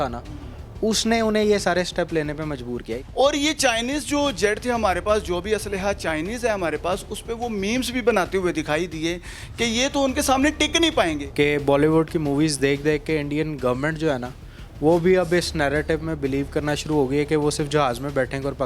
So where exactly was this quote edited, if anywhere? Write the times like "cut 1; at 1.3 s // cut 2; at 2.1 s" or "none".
cut 1; at 2.8 s // cut 2; at 11.2 s